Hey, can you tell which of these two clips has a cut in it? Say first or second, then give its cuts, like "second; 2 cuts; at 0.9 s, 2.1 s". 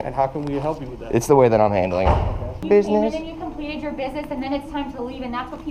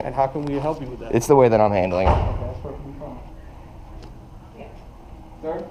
first; 1 cut; at 2.7 s